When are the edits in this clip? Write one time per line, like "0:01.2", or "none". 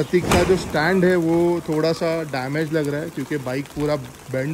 none